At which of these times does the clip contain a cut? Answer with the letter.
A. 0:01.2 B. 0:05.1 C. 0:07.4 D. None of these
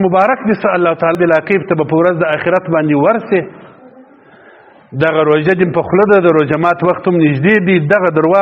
A